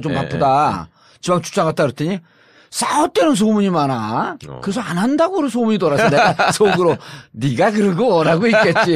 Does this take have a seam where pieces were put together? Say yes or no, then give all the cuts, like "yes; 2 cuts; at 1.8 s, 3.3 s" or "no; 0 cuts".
yes; 1 cut; at 3.1 s